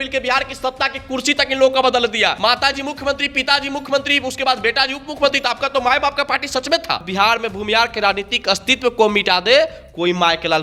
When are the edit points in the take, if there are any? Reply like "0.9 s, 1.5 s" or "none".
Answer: 2.4 s, 7.0 s